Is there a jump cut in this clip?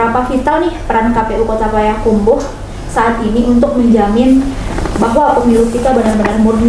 no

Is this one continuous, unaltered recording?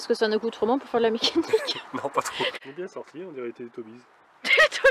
no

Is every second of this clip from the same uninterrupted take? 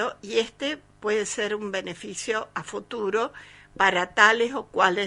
yes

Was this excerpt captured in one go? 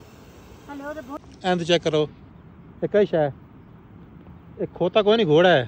no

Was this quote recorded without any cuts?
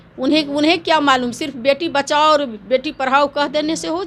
yes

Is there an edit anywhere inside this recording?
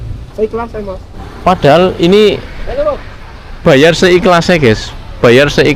yes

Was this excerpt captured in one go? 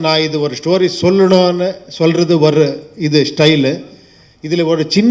yes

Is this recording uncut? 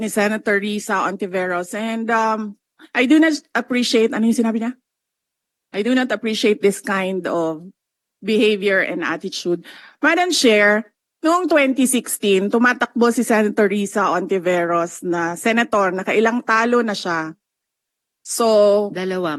yes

